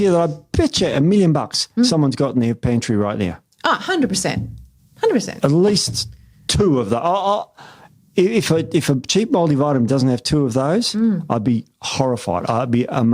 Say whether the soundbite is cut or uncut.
uncut